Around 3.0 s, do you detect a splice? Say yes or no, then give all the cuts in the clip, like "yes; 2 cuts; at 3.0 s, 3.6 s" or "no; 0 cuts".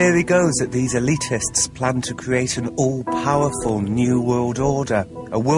yes; 1 cut; at 3.0 s